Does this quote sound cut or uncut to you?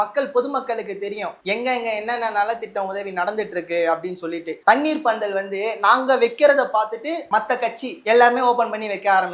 cut